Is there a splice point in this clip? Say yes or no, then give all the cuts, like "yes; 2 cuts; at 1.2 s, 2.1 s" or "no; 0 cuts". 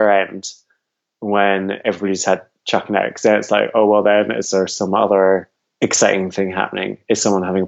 yes; 1 cut; at 5.6 s